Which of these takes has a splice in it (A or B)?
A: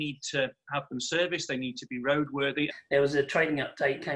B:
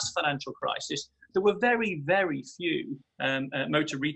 A